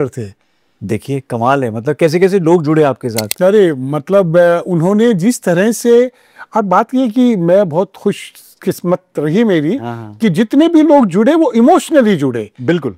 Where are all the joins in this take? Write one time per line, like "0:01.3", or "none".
none